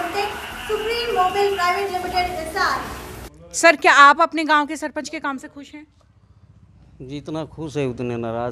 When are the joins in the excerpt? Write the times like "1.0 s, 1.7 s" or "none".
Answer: 3.3 s